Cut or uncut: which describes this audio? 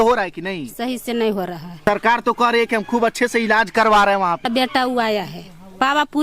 cut